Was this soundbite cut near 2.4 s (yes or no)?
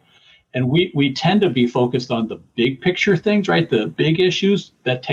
no